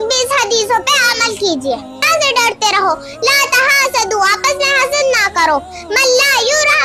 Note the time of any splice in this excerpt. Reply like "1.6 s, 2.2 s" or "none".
2.0 s